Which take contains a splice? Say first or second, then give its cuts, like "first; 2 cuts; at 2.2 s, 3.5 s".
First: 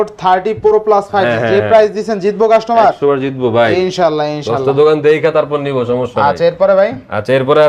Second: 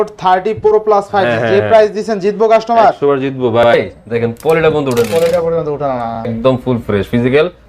second; 2 cuts; at 3.7 s, 6.2 s